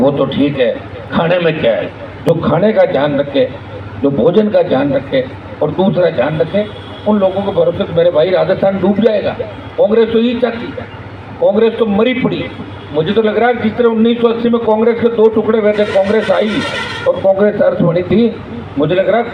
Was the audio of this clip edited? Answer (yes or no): no